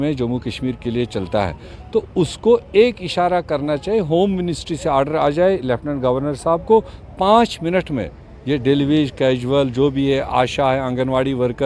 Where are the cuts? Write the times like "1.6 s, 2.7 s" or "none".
none